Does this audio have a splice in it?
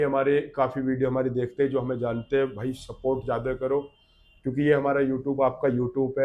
no; 0 cuts

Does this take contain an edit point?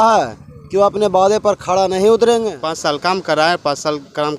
yes; 1 cut; at 2.6 s

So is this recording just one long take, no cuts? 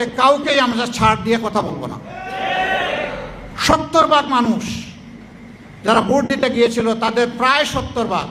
no; 1 cut; at 3.5 s

